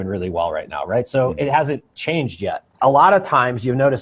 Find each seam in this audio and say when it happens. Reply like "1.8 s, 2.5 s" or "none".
2.7 s